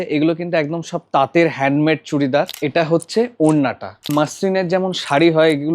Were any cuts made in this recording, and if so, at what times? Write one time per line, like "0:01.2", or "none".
0:02.6
0:04.1